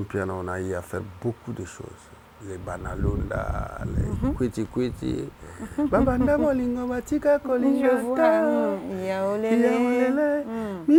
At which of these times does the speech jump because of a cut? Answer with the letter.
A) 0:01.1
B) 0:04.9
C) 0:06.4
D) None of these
D